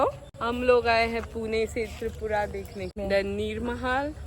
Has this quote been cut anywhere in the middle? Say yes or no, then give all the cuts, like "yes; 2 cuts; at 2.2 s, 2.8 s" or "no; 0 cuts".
yes; 1 cut; at 3.0 s